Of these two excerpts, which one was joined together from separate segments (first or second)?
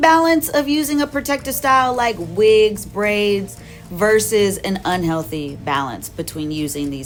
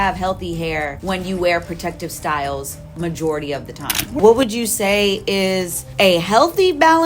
second